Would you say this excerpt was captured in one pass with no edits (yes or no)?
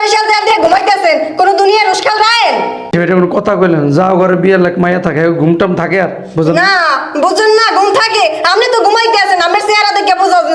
no